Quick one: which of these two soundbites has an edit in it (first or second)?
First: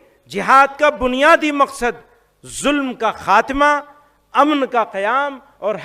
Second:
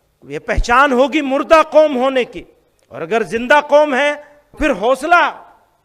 second